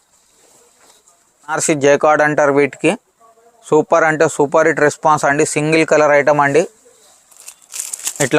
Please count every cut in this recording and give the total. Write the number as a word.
one